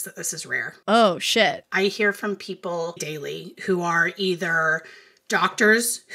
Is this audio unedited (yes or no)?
no